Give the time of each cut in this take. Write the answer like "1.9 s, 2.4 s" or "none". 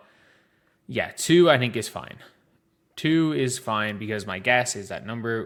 none

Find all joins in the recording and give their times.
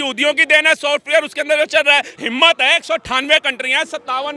2.1 s

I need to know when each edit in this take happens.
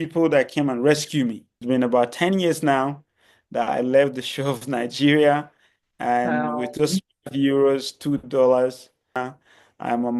1.5 s, 9.2 s

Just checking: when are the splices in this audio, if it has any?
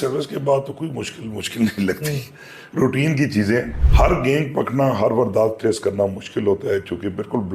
3.8 s

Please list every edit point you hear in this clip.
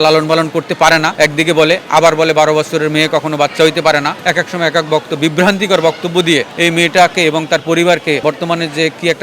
1.1 s, 4.1 s, 6.5 s, 8.2 s

